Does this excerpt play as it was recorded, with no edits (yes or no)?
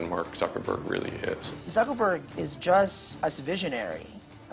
no